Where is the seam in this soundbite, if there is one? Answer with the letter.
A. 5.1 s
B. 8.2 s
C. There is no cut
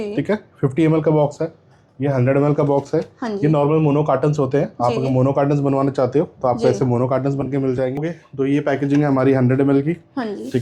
B